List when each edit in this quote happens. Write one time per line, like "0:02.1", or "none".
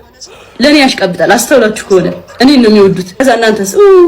0:03.1